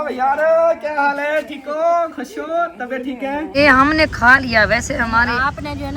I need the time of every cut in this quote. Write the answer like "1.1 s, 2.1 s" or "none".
3.6 s